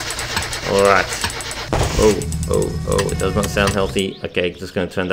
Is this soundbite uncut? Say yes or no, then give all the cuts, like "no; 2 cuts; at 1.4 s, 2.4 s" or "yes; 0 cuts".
yes; 0 cuts